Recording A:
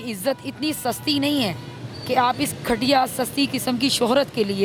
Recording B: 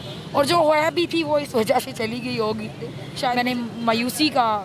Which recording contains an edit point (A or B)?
B